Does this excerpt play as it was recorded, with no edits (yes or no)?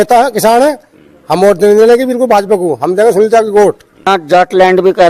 no